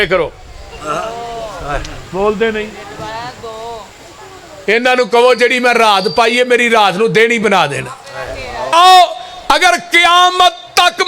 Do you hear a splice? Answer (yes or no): yes